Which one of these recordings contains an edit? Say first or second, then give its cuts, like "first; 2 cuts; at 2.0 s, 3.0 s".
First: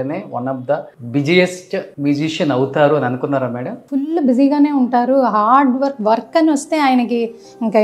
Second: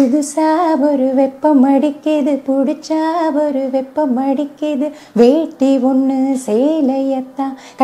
first; 3 cuts; at 0.9 s, 1.9 s, 3.7 s